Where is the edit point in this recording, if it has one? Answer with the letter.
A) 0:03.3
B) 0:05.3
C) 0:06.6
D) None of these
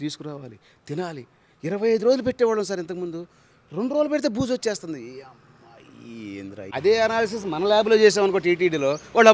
C